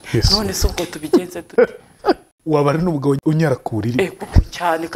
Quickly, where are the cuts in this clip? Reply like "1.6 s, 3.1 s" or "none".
2.3 s, 3.2 s

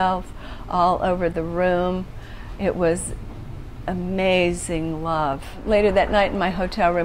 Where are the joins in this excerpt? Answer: 5.6 s

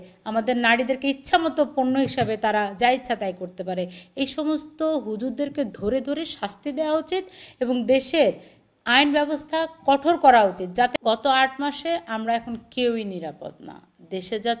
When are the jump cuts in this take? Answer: 10.9 s

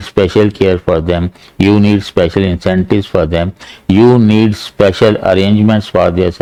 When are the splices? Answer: none

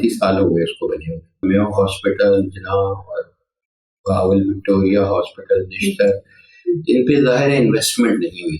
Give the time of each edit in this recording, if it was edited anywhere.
1.4 s

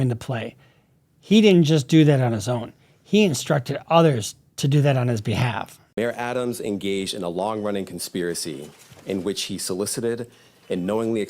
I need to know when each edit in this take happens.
5.8 s

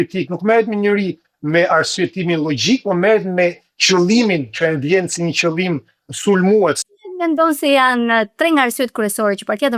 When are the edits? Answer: 6.8 s

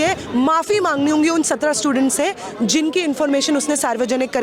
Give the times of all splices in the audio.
none

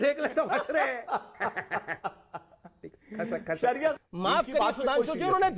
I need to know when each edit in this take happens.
4.0 s

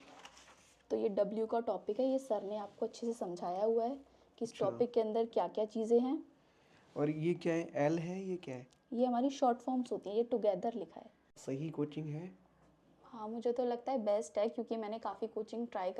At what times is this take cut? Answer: 11.4 s

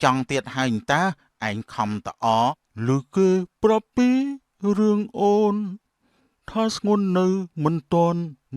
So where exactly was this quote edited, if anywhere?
2.7 s

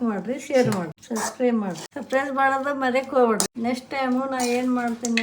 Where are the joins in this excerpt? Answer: 1.9 s, 3.5 s

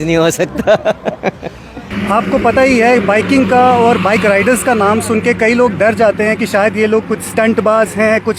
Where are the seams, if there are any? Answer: 1.9 s

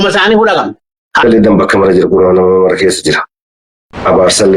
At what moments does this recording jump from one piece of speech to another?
1.2 s

